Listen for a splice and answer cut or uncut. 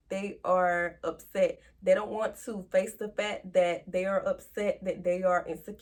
uncut